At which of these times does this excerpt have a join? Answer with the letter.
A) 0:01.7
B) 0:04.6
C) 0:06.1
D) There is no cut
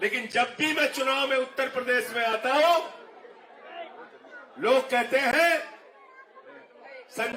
D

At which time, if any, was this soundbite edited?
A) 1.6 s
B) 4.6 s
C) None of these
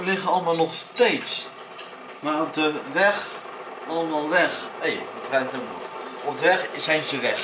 C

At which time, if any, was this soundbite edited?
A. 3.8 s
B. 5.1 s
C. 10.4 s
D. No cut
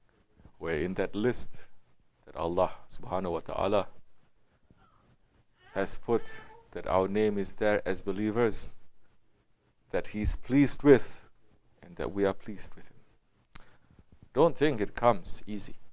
C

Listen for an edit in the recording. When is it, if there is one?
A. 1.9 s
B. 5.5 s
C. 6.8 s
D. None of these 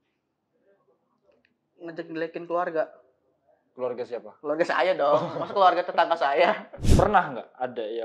C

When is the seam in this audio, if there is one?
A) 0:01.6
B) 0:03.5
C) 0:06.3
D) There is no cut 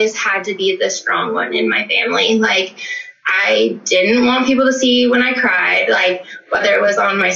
C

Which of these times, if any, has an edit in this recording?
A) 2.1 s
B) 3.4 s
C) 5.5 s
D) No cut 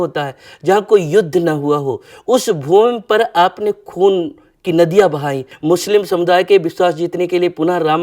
C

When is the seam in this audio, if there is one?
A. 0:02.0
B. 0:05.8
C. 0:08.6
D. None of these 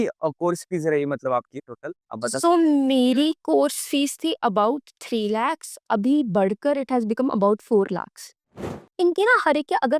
C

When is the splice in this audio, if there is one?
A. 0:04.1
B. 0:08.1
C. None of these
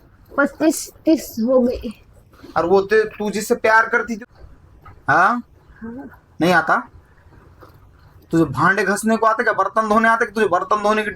A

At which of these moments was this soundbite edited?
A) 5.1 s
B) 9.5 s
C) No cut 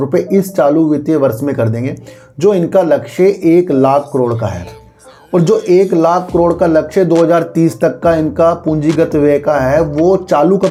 C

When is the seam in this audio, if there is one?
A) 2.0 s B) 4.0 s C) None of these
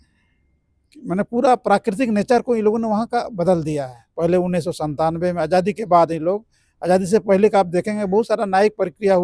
B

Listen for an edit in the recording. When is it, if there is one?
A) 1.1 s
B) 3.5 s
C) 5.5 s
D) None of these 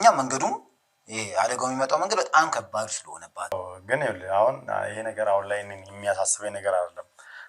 B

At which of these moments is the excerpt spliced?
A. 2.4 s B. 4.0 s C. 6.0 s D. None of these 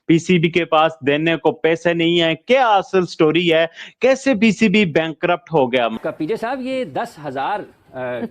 C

